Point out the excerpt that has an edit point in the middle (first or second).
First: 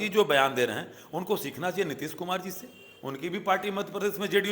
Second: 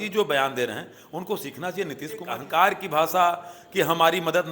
second